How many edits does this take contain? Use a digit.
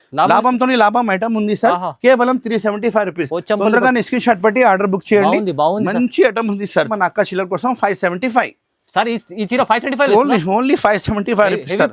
1